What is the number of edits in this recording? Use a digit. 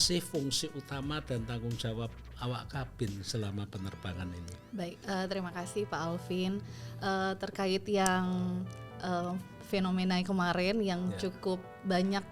0